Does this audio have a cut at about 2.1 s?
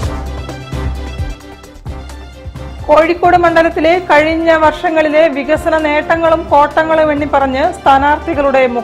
yes; 1 cut; at 2.1 s

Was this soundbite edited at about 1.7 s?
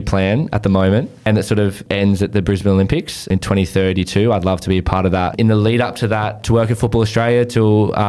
yes; 4 cuts; at 1.7 s, 3.3 s, 5.3 s, 6.4 s

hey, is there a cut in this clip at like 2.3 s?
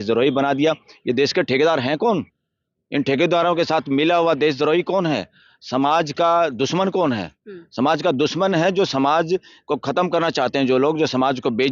no; 0 cuts

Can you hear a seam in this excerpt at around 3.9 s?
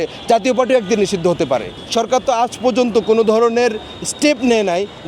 no; 1 cut; at 1.8 s

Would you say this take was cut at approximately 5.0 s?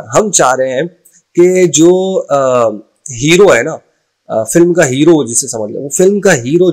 no; 0 cuts

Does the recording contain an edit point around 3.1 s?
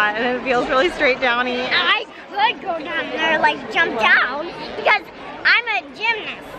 no; 1 cut; at 1.7 s

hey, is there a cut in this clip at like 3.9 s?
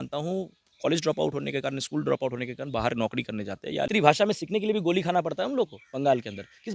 yes; 1 cut; at 3.9 s

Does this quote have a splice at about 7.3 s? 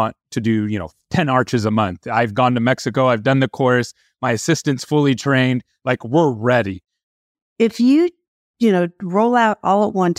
yes; 1 cut; at 7.3 s

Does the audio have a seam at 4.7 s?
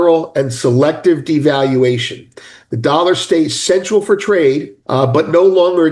yes; 1 cut; at 4.7 s

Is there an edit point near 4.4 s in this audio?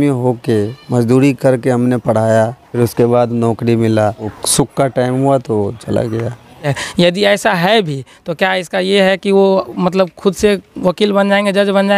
yes; 3 cuts; at 2.6 s, 4.4 s, 6.8 s

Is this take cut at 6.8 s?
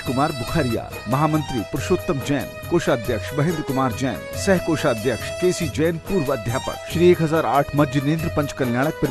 yes; 2 cuts; at 5.3 s, 6.8 s

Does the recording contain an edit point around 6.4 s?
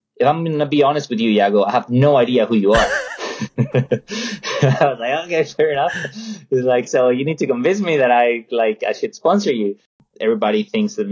no; 1 cut; at 10.0 s

